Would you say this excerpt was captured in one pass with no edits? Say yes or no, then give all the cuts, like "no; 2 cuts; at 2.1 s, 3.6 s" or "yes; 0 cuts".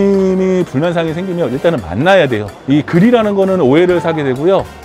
no; 1 cut; at 2.5 s